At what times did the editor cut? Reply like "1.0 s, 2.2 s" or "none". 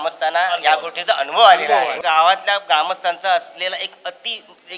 2.0 s